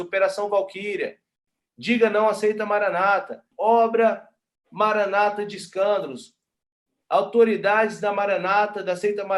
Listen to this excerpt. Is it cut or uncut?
cut